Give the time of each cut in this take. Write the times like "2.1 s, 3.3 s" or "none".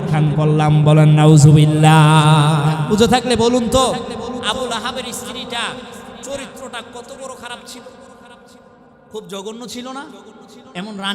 2.8 s